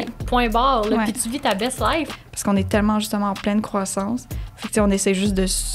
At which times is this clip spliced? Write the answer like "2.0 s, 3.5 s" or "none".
2.1 s